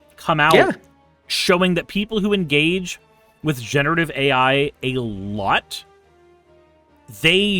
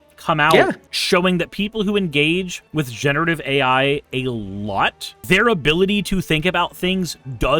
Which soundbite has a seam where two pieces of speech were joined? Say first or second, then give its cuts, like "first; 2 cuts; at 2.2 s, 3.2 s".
second; 3 cuts; at 0.9 s, 2.6 s, 5.2 s